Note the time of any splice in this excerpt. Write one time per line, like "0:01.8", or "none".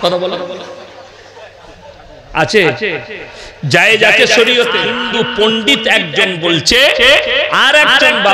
0:04.9

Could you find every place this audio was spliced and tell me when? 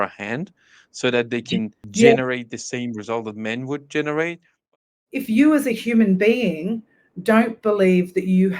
0:01.9
0:04.8

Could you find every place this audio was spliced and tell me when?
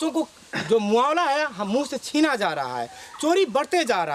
none

